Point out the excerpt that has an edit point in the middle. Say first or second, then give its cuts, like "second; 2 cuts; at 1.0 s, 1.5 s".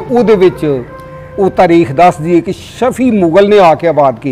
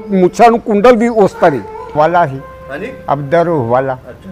second; 1 cut; at 1.9 s